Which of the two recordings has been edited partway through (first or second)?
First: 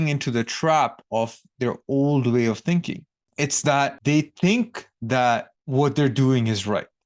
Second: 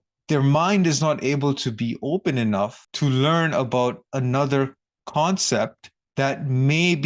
first